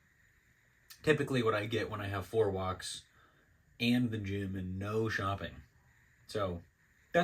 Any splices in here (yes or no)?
no